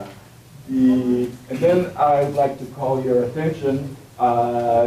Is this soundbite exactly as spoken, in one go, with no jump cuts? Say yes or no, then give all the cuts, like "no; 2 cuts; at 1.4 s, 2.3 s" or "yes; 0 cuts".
yes; 0 cuts